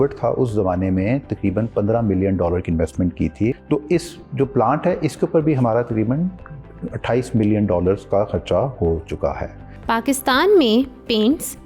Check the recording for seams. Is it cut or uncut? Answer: uncut